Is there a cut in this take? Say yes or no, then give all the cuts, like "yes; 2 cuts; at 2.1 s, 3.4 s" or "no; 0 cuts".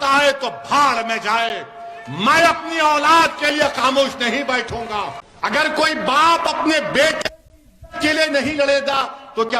yes; 1 cut; at 5.2 s